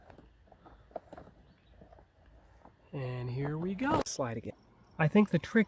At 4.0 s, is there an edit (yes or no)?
yes